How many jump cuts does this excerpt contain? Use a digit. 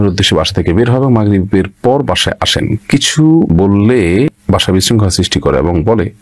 0